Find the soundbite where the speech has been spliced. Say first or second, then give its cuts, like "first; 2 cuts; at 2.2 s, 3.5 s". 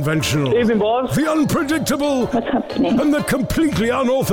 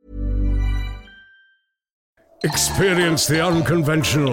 second; 1 cut; at 2.3 s